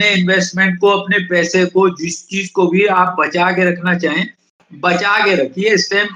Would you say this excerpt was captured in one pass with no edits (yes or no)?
yes